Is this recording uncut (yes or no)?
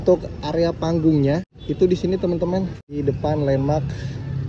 no